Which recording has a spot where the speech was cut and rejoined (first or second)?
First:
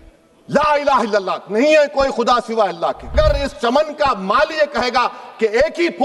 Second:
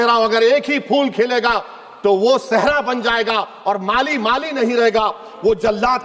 first